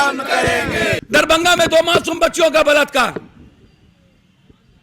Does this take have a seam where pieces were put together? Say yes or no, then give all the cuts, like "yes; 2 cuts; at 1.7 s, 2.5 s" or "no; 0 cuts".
yes; 1 cut; at 1.0 s